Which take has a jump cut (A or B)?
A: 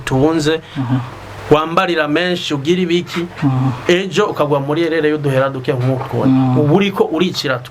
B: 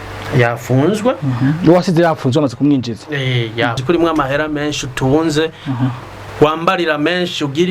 B